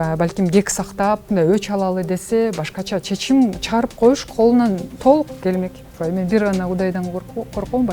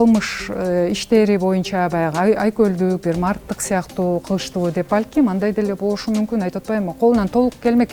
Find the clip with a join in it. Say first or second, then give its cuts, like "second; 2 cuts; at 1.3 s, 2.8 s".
first; 3 cuts; at 1.2 s, 4.9 s, 5.9 s